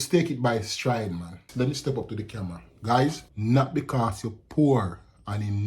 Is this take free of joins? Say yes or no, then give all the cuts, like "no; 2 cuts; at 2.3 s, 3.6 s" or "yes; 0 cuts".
no; 1 cut; at 1.4 s